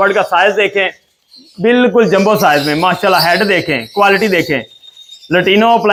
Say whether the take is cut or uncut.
uncut